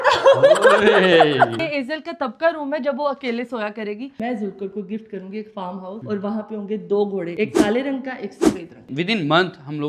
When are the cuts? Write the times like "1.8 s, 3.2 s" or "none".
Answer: 1.5 s, 4.2 s, 8.9 s